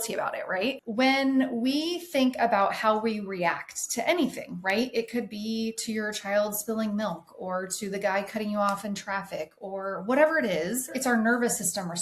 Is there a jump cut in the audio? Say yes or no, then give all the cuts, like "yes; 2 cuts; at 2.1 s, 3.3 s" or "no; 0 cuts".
yes; 2 cuts; at 0.8 s, 10.9 s